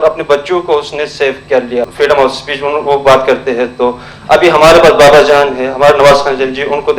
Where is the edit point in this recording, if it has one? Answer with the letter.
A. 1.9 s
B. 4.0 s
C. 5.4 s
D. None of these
A